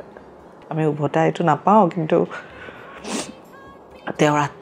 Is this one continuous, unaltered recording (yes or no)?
yes